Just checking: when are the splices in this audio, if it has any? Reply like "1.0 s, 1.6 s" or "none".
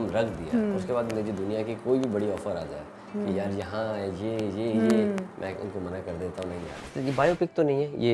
6.9 s